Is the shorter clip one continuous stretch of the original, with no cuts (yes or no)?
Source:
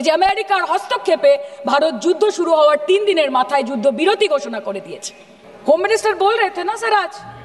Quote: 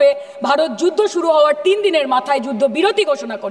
yes